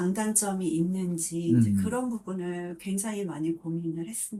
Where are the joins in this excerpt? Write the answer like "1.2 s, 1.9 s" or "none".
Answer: none